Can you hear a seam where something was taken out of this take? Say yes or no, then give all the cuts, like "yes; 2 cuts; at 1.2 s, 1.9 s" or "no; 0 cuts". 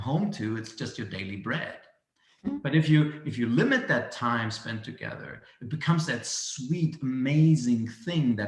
no; 0 cuts